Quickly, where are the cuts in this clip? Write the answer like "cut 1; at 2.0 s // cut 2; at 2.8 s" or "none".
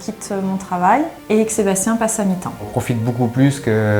cut 1; at 1.2 s // cut 2; at 2.7 s

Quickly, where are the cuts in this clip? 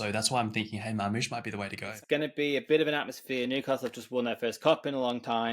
cut 1; at 1.9 s

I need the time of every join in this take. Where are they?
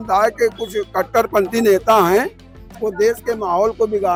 none

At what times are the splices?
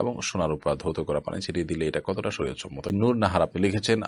cut 1; at 2.9 s

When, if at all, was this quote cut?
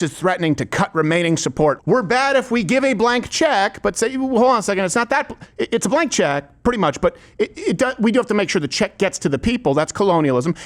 cut 1; at 1.8 s

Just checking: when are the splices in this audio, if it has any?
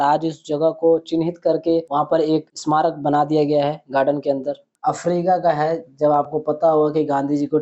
cut 1; at 4.7 s

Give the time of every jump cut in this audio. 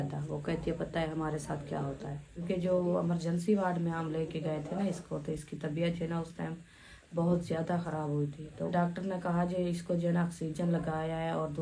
cut 1; at 2.4 s // cut 2; at 8.7 s

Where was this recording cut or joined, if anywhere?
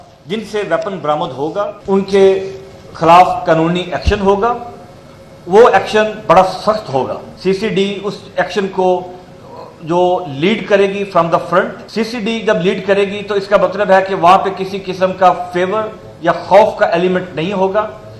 cut 1; at 1.8 s // cut 2; at 7.3 s // cut 3; at 11.8 s

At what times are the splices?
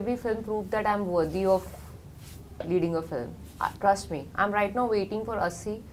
none

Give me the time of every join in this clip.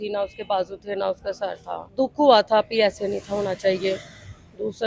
none

